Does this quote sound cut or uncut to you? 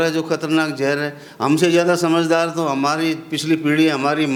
uncut